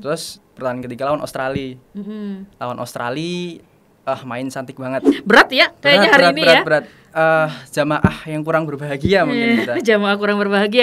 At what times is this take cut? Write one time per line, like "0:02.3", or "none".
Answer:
0:05.1